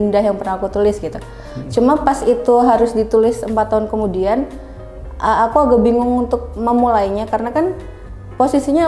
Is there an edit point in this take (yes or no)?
no